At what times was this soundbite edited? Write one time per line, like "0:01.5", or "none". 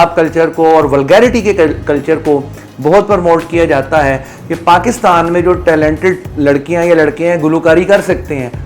0:04.3